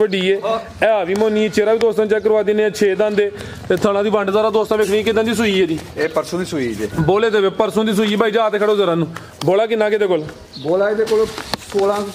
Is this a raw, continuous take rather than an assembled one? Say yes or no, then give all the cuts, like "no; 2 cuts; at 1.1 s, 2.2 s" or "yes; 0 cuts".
yes; 0 cuts